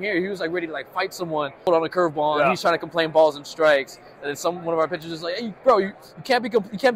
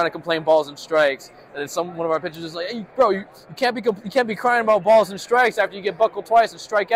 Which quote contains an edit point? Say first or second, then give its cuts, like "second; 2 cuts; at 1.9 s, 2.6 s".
first; 1 cut; at 1.6 s